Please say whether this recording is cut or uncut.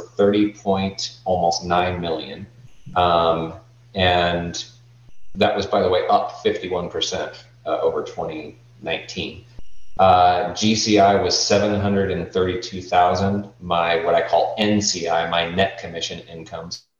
uncut